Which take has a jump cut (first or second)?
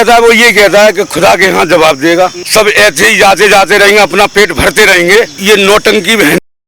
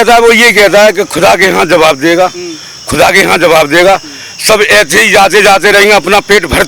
first